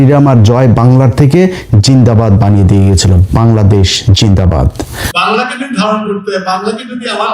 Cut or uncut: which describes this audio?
cut